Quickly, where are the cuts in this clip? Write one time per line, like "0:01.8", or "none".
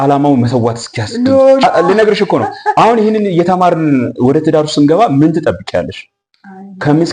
0:01.6